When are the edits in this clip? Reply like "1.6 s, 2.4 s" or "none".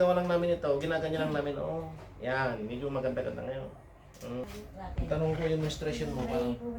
4.5 s